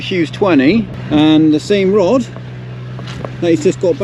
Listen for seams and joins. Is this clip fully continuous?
no; 1 cut; at 1.0 s

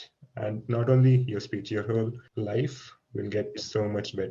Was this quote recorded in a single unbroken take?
no; 1 cut; at 2.2 s

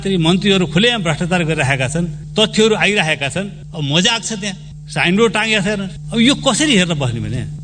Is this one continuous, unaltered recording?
yes; 0 cuts

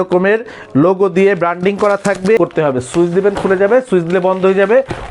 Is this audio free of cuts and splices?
no; 1 cut; at 2.4 s

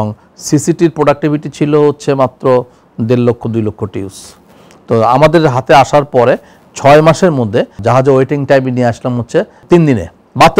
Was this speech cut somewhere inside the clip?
yes; 2 cuts; at 7.8 s, 9.6 s

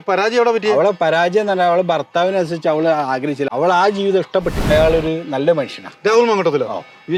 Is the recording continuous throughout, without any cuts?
no; 2 cuts; at 3.5 s, 4.7 s

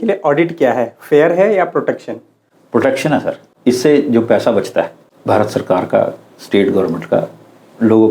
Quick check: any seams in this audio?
yes; 2 cuts; at 3.4 s, 5.0 s

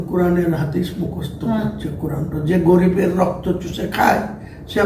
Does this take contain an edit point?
yes; 1 cut; at 2.3 s

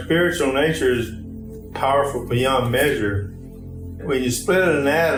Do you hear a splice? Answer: no; 0 cuts

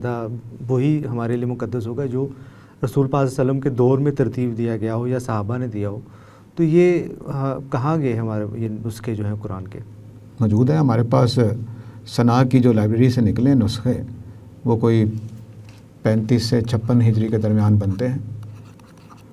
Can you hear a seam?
no; 0 cuts

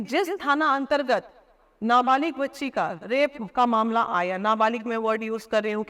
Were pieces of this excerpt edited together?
no; 0 cuts

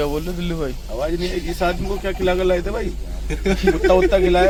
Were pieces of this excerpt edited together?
no; 0 cuts

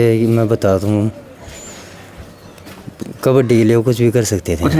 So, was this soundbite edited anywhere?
no; 0 cuts

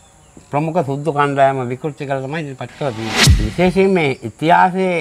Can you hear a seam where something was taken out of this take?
yes; 1 cut; at 3.2 s

